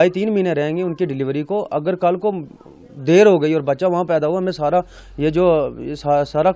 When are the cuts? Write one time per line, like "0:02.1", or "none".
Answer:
none